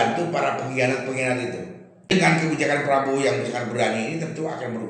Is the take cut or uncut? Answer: cut